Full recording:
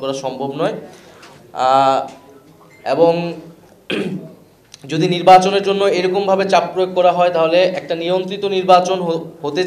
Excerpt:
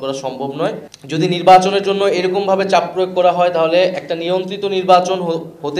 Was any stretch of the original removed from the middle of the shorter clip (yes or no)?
yes